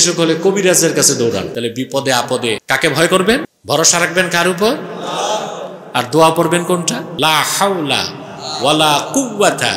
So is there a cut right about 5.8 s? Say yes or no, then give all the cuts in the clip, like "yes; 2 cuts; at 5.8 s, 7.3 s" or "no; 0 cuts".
no; 4 cuts; at 1.5 s, 2.6 s, 3.5 s, 7.1 s